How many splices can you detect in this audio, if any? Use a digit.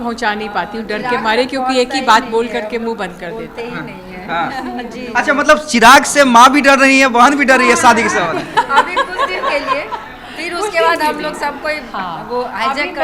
0